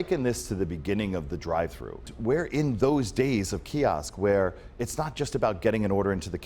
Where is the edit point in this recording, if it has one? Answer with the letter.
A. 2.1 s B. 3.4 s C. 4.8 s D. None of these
A